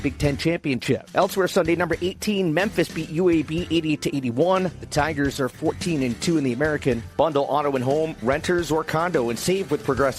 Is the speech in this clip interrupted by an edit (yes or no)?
yes